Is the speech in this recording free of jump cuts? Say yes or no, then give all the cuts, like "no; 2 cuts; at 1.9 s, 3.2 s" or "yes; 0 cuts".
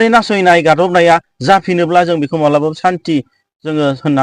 yes; 0 cuts